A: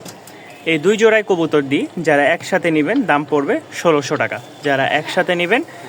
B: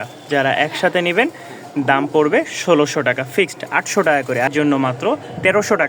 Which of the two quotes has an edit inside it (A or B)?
B